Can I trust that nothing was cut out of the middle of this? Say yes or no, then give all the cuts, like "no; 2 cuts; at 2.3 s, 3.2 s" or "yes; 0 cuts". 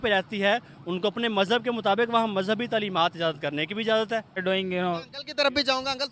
no; 1 cut; at 4.4 s